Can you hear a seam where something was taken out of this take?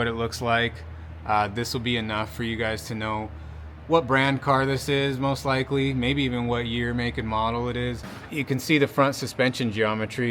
yes; 1 cut; at 8.1 s

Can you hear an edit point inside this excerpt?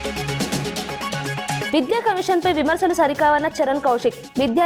yes; 1 cut; at 1.7 s

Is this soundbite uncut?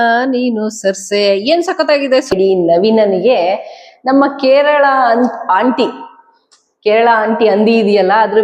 no; 1 cut; at 2.3 s

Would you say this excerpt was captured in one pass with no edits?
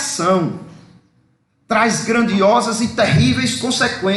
yes; 0 cuts

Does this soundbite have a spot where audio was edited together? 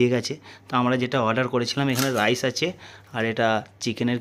no; 0 cuts

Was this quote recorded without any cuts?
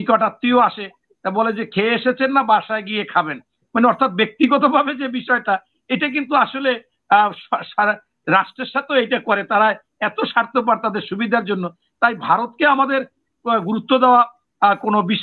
yes; 0 cuts

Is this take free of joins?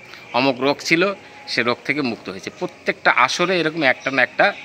yes; 0 cuts

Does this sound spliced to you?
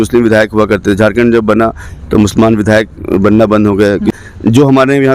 yes; 1 cut; at 4.1 s

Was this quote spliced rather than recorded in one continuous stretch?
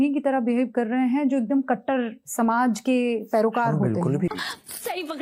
yes; 1 cut; at 4.2 s

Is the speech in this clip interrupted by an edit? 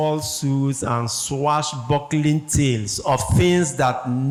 no; 0 cuts

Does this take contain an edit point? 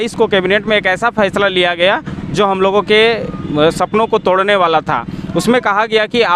no; 0 cuts

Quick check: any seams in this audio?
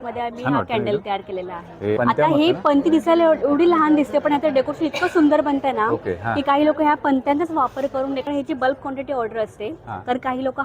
yes; 2 cuts; at 2.0 s, 8.2 s

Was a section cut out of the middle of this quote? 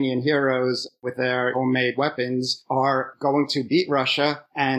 no; 0 cuts

